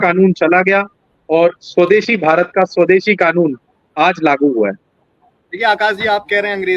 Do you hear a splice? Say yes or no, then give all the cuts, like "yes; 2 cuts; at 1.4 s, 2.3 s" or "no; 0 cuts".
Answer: no; 0 cuts